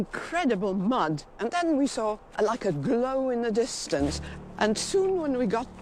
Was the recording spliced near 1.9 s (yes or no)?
no